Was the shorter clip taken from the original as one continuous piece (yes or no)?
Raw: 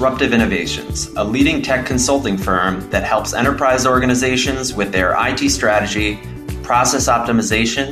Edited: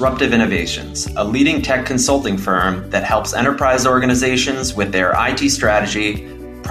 yes